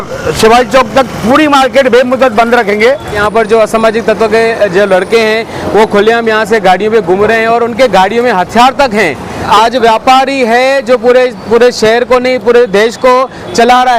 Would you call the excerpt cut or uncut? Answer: cut